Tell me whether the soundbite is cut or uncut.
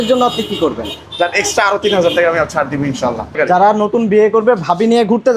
cut